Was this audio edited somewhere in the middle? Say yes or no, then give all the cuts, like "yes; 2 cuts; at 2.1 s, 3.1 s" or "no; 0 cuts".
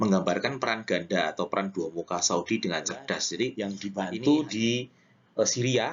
yes; 1 cut; at 3.8 s